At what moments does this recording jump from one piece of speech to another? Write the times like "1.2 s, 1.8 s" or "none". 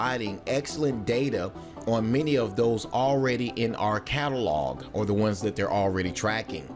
3.3 s